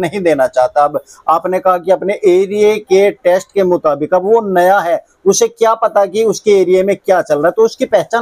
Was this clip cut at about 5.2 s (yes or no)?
no